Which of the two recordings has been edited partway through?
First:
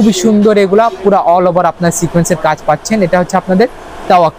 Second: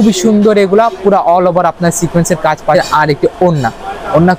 second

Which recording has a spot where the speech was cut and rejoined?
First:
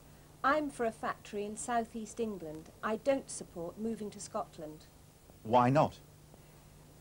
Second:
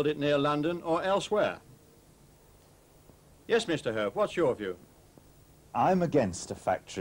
first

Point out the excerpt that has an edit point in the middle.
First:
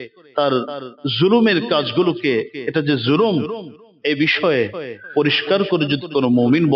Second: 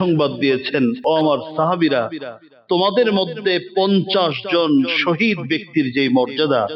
second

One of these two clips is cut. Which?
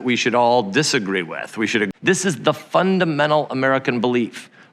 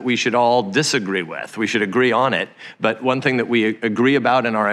first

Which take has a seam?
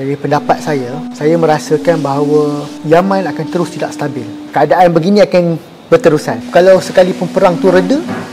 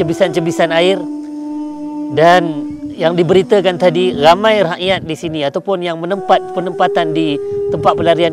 first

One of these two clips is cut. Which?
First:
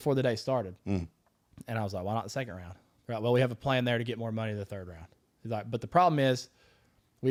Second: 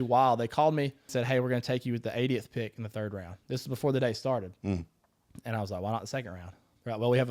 second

